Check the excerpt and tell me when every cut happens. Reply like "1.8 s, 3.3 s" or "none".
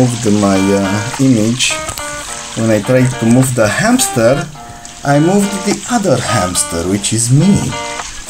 none